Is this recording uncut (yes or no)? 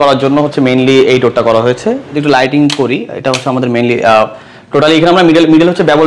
no